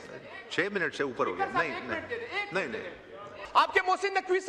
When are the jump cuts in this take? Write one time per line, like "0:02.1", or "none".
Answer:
0:03.4